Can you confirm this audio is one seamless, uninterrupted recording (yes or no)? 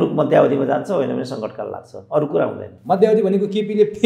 yes